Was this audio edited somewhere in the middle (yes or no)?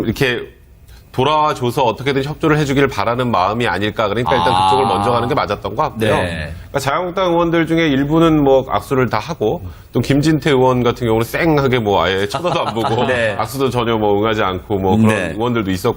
yes